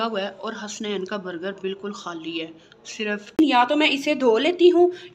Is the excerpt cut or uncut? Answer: cut